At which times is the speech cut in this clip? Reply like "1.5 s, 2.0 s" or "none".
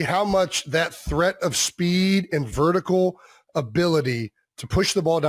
none